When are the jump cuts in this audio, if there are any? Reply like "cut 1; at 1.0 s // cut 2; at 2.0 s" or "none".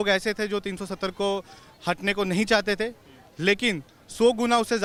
none